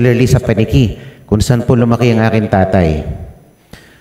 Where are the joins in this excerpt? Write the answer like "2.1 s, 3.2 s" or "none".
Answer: none